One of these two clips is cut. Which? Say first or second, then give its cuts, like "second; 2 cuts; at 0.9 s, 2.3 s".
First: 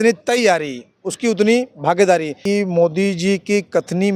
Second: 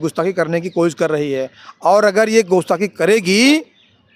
first; 1 cut; at 2.4 s